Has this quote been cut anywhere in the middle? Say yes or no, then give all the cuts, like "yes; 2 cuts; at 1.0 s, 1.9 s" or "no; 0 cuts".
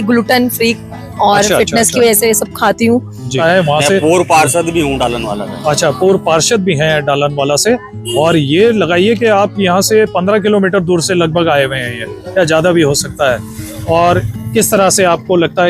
yes; 1 cut; at 3.4 s